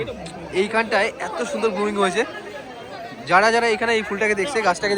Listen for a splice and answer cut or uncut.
uncut